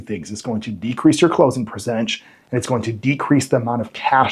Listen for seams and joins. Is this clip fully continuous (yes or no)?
yes